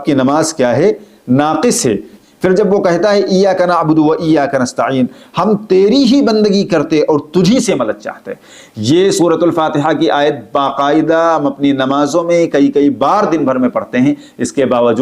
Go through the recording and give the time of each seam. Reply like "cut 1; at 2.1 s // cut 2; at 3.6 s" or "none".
cut 1; at 2.2 s